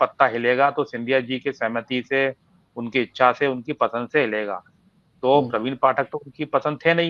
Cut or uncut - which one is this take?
uncut